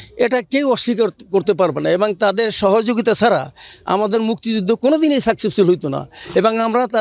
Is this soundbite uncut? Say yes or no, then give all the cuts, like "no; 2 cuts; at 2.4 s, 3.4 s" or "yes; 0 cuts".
yes; 0 cuts